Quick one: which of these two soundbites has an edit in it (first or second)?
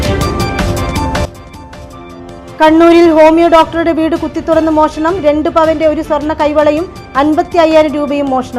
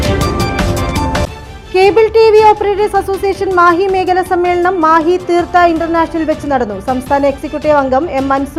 first